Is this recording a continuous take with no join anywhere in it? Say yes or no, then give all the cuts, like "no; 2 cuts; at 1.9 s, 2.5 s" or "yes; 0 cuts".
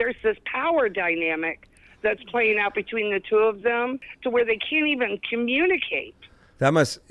no; 1 cut; at 4.1 s